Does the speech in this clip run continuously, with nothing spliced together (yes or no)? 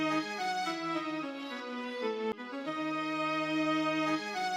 yes